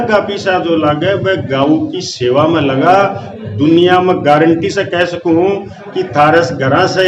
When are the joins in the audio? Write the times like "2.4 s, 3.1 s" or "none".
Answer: none